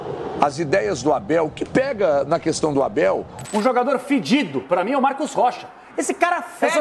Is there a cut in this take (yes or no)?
yes